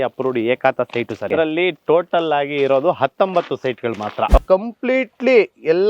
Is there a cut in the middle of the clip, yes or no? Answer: yes